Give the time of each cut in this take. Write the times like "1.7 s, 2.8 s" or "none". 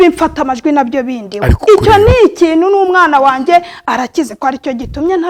none